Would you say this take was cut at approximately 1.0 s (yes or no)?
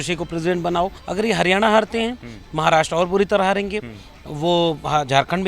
yes